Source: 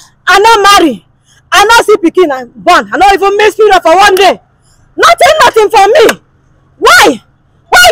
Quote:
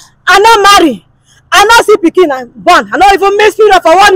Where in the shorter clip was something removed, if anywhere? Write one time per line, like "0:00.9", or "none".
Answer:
none